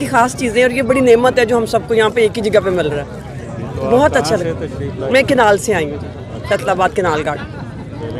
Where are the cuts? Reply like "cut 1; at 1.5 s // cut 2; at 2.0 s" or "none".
none